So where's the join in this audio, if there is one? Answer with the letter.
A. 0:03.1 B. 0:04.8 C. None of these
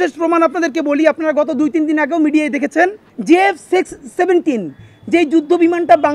A